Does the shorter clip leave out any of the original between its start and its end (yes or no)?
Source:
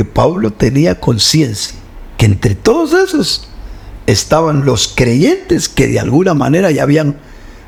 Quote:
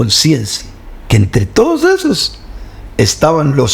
no